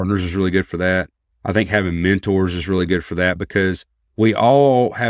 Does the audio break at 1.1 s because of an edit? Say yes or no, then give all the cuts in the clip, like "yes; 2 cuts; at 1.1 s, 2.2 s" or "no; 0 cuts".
no; 0 cuts